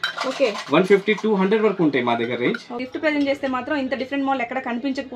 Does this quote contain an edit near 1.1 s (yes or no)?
no